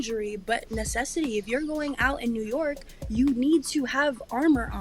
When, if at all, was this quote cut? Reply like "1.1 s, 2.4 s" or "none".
none